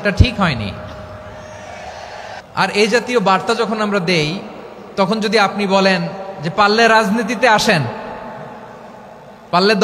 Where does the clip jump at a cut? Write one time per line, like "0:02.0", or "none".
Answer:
0:02.4